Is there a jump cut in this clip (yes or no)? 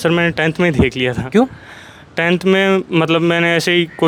no